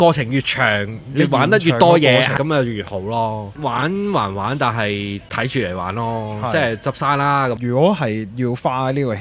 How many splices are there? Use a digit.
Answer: 4